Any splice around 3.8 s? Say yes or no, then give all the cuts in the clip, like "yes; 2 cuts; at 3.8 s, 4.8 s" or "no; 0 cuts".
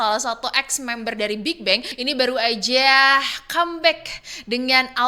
no; 1 cut; at 1.9 s